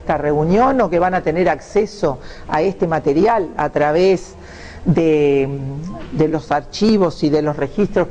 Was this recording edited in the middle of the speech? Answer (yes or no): no